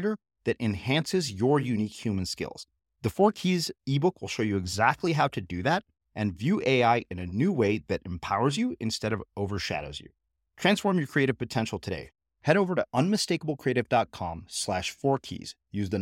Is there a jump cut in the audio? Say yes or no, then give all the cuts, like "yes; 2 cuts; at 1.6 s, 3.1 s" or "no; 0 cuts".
no; 0 cuts